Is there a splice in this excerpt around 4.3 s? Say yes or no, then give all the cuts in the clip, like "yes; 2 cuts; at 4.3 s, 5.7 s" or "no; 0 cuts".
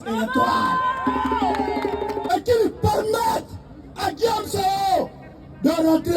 no; 1 cut; at 2.3 s